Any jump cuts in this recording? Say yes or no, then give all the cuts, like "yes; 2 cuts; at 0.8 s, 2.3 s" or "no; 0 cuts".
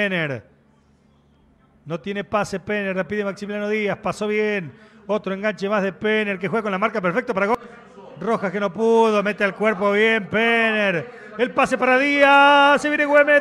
yes; 1 cut; at 7.5 s